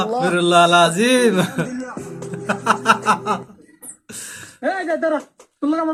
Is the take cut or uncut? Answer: uncut